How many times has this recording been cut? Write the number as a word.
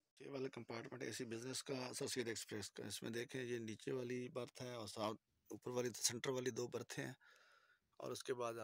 zero